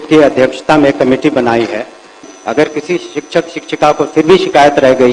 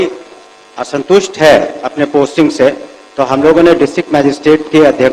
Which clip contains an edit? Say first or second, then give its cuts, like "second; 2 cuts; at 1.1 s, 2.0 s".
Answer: first; 1 cut; at 2.2 s